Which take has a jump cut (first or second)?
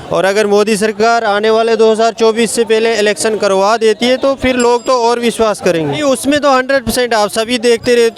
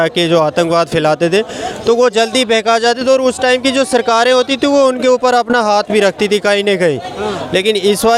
first